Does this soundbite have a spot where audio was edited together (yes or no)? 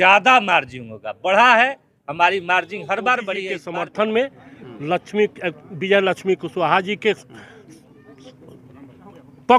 yes